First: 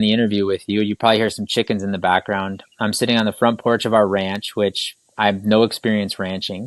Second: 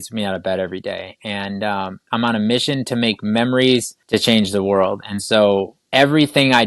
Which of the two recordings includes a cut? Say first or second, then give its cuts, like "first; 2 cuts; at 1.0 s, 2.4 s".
second; 3 cuts; at 2.1 s, 4.0 s, 5.8 s